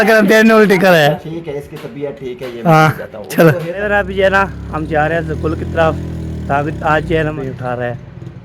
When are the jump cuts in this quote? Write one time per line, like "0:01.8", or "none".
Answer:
0:03.7
0:07.3